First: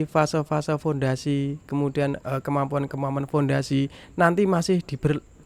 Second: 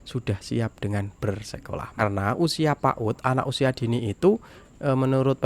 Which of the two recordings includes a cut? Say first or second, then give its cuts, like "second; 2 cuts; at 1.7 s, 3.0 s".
second; 1 cut; at 2.0 s